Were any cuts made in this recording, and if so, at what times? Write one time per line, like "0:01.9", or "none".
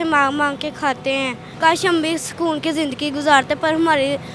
0:01.4